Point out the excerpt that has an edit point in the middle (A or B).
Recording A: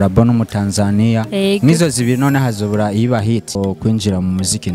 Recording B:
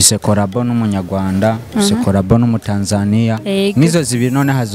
A